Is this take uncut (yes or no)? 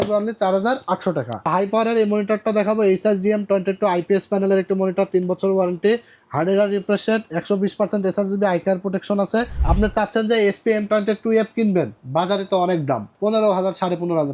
no